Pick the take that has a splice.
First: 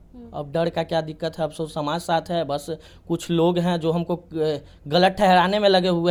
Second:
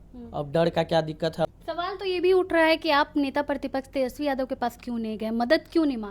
second; 1 cut; at 1.6 s

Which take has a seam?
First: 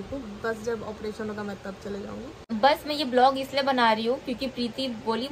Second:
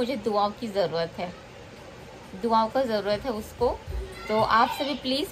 first; 1 cut; at 2.4 s

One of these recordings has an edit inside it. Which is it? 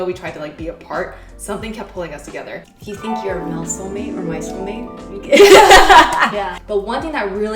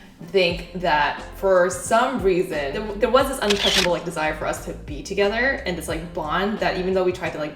first; 2 cuts; at 2.7 s, 6.6 s

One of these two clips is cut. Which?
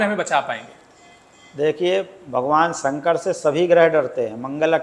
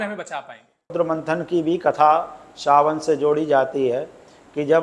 second; 1 cut; at 0.9 s

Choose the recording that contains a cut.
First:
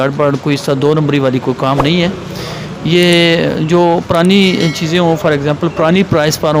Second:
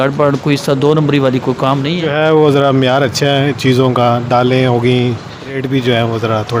second; 2 cuts; at 1.9 s, 5.6 s

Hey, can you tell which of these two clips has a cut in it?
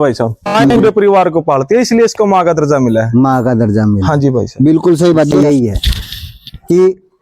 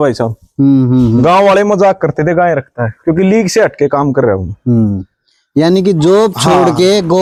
first; 2 cuts; at 0.7 s, 5.3 s

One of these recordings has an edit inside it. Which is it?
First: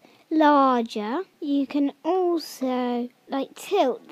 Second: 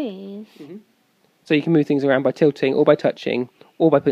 first; 2 cuts; at 1.3 s, 3.2 s

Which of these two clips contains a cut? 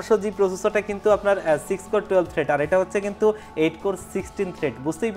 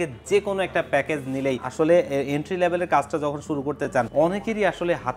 second; 2 cuts; at 1.7 s, 4.1 s

